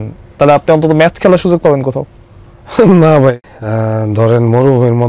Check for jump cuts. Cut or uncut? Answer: cut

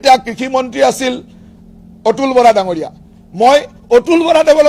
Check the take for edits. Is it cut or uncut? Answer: uncut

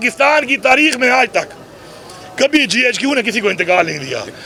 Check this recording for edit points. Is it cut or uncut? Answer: uncut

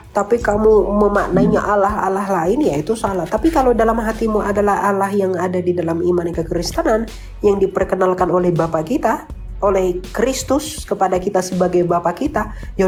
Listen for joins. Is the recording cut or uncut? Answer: uncut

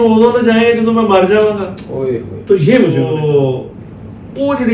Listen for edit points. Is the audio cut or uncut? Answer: cut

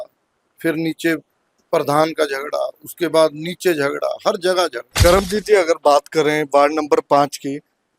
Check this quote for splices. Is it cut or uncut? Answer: cut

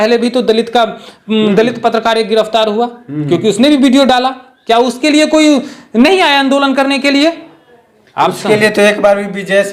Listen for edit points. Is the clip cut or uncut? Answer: uncut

